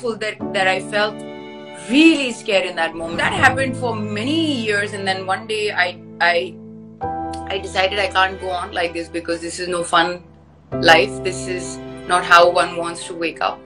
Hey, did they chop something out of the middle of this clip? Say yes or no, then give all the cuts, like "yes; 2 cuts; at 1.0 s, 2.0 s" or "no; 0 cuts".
yes; 1 cut; at 3.1 s